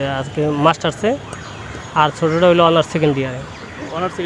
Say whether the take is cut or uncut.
uncut